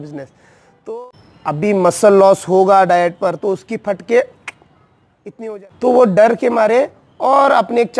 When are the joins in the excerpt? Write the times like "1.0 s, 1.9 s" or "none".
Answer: 1.0 s, 5.4 s